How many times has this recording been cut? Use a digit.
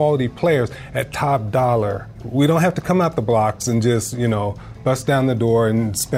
1